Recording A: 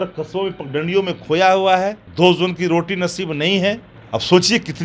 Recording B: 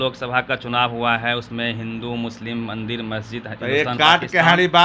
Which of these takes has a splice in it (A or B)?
A